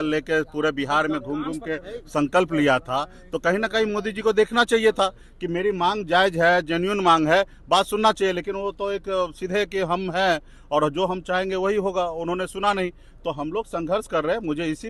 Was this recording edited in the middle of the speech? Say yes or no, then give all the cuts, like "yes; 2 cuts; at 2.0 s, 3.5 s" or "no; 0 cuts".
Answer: no; 0 cuts